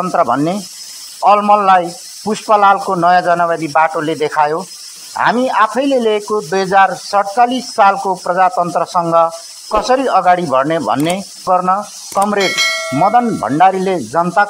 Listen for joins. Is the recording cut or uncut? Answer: cut